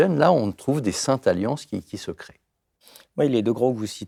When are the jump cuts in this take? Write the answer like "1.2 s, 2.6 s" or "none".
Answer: none